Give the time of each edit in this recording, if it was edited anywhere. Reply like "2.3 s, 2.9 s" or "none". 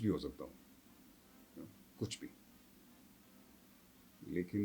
none